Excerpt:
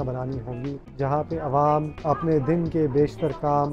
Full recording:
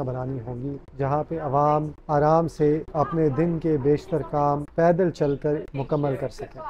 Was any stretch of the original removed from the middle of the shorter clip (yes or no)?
yes